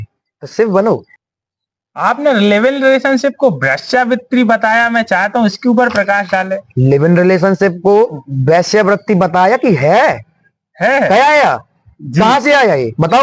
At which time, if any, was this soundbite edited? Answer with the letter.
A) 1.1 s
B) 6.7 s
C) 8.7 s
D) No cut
A